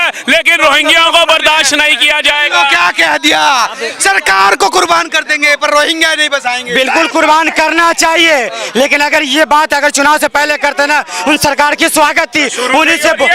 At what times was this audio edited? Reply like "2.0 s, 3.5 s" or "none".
none